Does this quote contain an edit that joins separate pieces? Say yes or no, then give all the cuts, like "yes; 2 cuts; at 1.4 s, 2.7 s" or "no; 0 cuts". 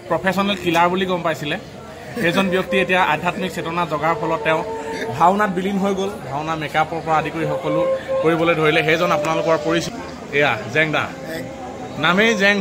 no; 0 cuts